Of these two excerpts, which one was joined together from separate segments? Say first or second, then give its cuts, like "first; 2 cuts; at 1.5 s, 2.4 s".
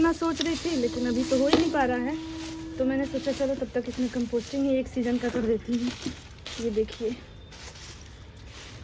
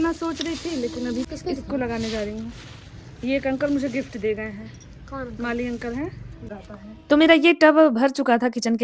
second; 2 cuts; at 1.3 s, 6.5 s